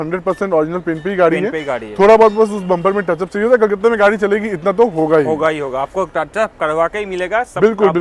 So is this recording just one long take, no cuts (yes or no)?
yes